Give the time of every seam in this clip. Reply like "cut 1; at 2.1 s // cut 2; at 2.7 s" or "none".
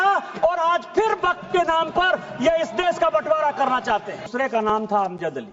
cut 1; at 4.2 s